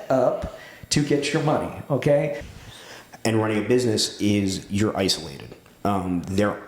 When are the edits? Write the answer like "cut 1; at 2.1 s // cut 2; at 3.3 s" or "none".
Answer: cut 1; at 2.4 s